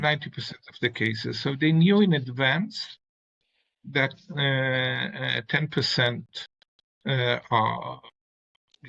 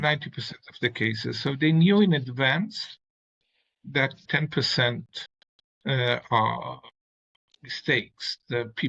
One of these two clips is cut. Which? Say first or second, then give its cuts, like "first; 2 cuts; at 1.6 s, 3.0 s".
second; 1 cut; at 4.2 s